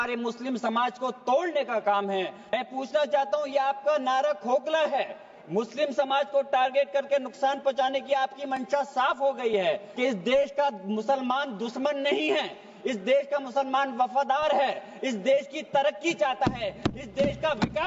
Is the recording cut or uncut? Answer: cut